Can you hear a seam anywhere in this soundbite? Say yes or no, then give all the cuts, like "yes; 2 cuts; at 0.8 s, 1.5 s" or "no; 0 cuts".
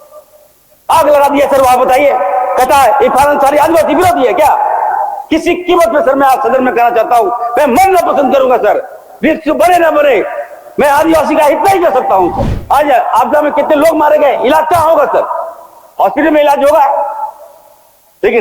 yes; 1 cut; at 12.5 s